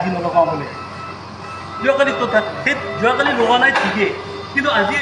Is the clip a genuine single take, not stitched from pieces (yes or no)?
yes